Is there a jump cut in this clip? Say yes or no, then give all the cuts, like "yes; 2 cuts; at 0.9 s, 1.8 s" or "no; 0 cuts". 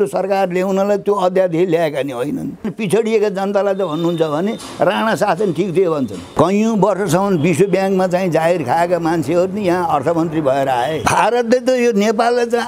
yes; 3 cuts; at 2.7 s, 6.3 s, 11.0 s